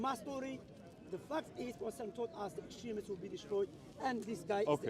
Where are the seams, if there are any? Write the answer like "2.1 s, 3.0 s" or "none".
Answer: none